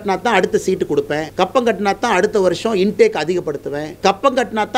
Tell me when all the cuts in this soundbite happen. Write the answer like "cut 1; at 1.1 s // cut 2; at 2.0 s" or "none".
cut 1; at 1.3 s // cut 2; at 3.9 s